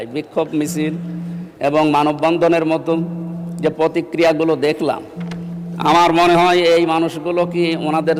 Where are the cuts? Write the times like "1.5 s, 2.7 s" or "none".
none